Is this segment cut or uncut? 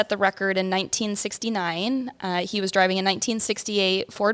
uncut